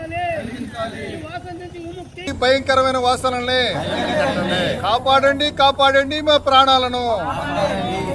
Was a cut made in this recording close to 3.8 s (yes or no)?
no